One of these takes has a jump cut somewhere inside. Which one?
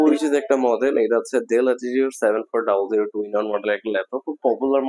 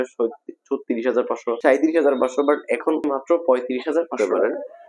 second; 3 cuts; at 1.6 s, 3.0 s, 4.1 s

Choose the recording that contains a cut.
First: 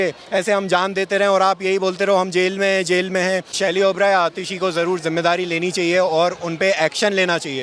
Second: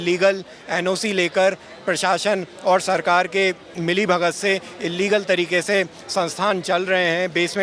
first; 1 cut; at 3.5 s

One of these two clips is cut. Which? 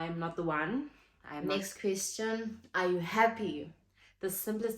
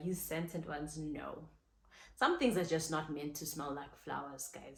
first; 1 cut; at 1.5 s

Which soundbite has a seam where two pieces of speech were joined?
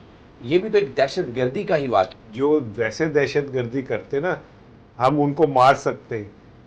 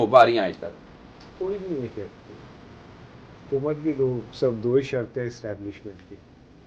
first; 1 cut; at 2.1 s

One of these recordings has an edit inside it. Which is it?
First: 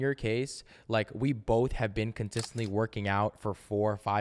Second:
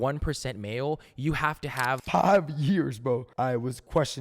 second; 2 cuts; at 2.0 s, 3.3 s

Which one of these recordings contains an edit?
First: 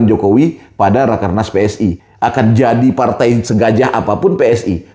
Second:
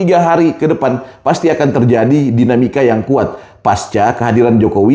first; 1 cut; at 2.0 s

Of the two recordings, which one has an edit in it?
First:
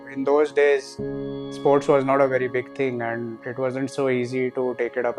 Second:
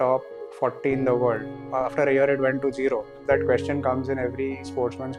second; 2 cuts; at 1.6 s, 3.2 s

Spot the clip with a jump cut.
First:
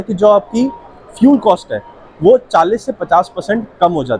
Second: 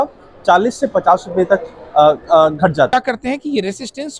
second; 1 cut; at 2.9 s

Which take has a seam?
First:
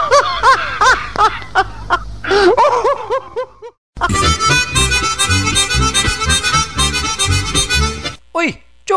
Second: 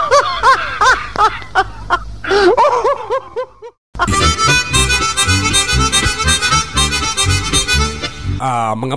first; 2 cuts; at 3.9 s, 8.0 s

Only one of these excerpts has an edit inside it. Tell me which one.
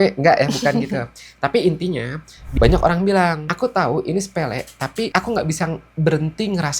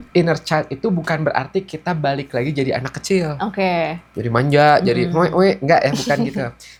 first; 3 cuts; at 2.4 s, 3.5 s, 5.1 s

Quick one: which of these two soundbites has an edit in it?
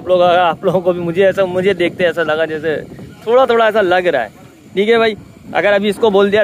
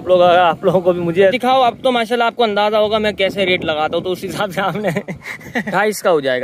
second; 2 cuts; at 1.3 s, 5.7 s

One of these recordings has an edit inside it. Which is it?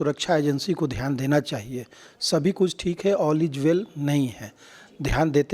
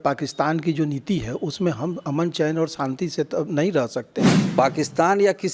second; 1 cut; at 4.4 s

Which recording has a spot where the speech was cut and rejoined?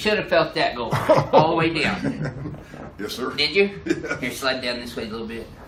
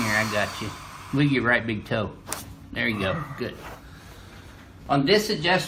second; 1 cut; at 3.6 s

